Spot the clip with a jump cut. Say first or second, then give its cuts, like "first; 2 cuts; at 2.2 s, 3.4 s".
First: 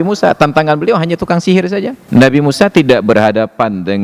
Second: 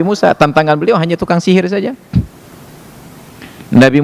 first; 1 cut; at 2.0 s